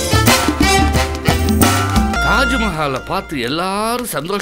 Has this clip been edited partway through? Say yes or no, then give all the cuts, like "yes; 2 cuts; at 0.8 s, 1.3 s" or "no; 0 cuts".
yes; 1 cut; at 2.2 s